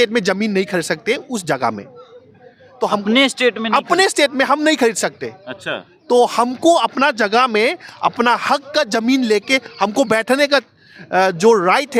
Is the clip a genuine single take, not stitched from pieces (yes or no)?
yes